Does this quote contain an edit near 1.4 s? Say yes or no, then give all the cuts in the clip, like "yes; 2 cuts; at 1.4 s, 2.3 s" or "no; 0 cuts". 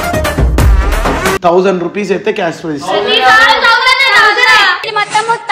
yes; 1 cut; at 1.4 s